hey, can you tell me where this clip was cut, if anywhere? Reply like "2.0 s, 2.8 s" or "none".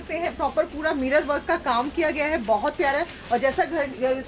none